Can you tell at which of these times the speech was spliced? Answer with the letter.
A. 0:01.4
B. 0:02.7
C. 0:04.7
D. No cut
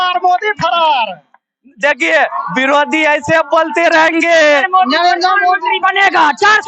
C